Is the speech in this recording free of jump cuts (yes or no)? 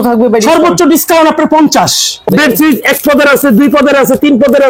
no